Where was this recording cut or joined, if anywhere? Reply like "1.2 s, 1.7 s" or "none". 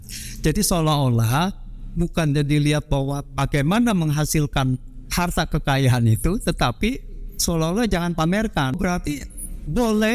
8.8 s